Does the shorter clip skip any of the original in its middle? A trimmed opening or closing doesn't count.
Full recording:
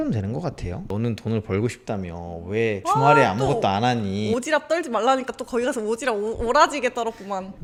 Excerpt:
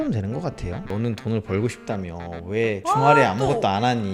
no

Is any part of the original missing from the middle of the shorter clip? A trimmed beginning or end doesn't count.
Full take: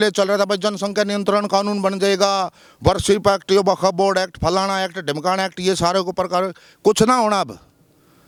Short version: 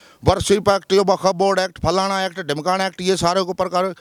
no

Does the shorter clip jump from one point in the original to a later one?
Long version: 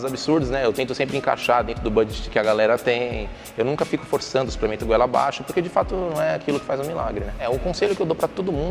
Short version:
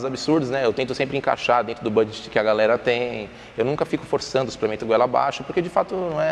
no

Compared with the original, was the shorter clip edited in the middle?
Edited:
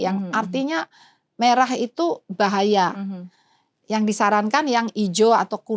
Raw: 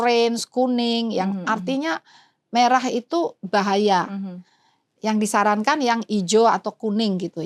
no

